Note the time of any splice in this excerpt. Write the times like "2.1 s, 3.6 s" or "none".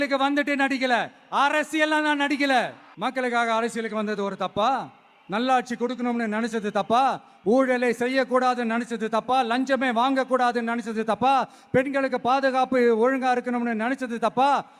2.8 s